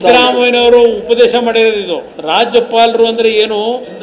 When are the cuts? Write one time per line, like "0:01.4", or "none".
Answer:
0:02.1